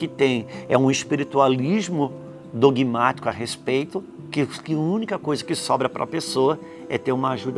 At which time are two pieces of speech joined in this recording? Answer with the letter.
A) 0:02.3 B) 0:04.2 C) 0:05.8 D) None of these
B